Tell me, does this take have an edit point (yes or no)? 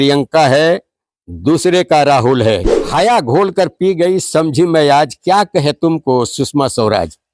yes